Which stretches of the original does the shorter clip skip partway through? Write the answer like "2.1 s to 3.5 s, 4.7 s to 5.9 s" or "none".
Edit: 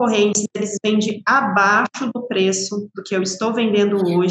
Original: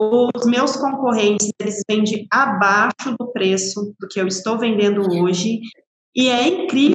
none